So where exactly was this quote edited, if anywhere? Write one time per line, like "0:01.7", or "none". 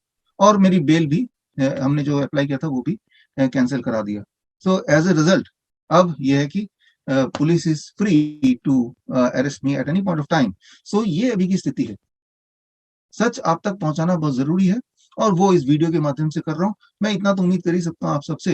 0:12.4